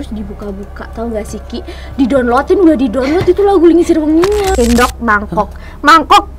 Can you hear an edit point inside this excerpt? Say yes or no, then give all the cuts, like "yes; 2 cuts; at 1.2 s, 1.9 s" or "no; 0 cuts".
yes; 1 cut; at 4.5 s